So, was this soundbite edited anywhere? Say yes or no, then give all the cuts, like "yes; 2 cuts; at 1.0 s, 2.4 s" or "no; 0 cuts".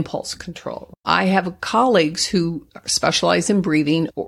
yes; 1 cut; at 1.0 s